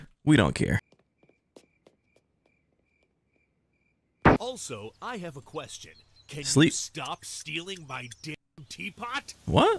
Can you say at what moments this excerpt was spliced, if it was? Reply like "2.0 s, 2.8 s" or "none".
4.4 s